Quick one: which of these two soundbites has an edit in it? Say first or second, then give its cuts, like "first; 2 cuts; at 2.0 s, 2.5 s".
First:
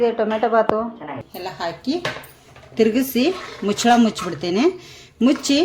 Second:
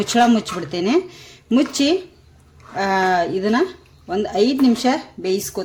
first; 1 cut; at 1.3 s